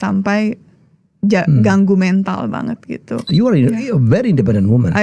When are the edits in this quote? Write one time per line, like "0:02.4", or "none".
0:03.3